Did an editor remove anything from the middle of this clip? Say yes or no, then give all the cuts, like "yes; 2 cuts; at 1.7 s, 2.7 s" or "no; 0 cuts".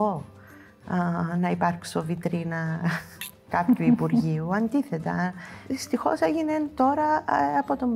yes; 1 cut; at 5.6 s